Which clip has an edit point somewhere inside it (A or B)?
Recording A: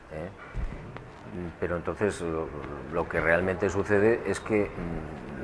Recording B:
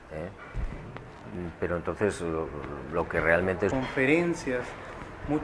A